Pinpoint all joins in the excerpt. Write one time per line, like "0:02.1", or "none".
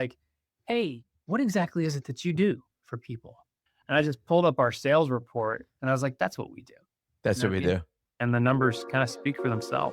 0:08.0